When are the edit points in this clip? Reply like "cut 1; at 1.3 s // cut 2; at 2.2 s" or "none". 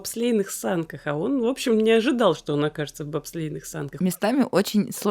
cut 1; at 4.0 s